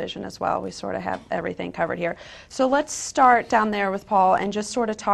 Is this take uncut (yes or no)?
yes